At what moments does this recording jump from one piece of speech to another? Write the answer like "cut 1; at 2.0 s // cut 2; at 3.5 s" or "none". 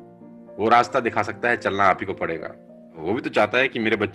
cut 1; at 3.0 s

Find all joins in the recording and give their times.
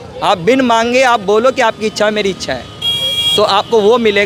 none

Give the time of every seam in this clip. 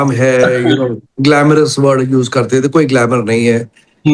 none

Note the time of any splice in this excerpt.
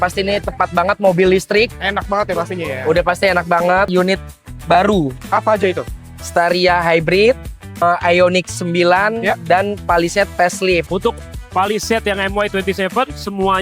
cut 1; at 3.9 s // cut 2; at 7.8 s // cut 3; at 10.9 s

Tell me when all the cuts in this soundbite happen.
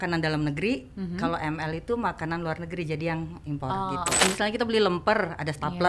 cut 1; at 4.2 s

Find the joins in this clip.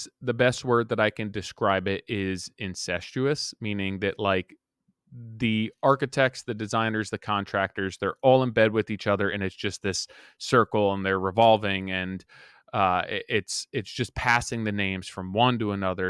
none

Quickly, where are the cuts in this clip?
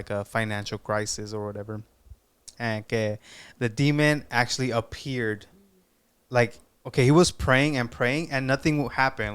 cut 1; at 2.5 s

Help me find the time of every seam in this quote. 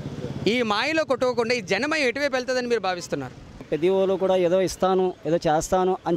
cut 1; at 3.7 s

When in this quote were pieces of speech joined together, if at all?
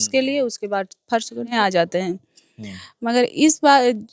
cut 1; at 1.5 s

